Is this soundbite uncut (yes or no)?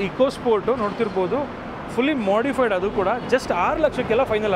yes